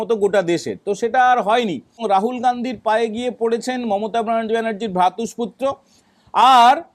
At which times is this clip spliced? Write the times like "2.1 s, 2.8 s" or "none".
2.0 s